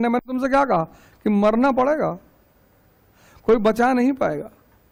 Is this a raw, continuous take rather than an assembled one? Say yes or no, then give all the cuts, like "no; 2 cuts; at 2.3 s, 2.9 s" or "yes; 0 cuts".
yes; 0 cuts